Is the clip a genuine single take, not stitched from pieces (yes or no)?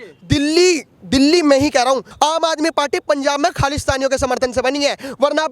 no